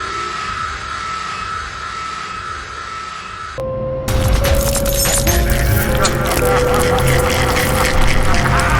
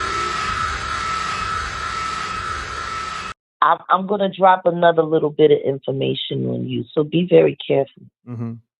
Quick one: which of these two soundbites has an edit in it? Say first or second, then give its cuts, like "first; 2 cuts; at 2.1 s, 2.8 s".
second; 1 cut; at 3.3 s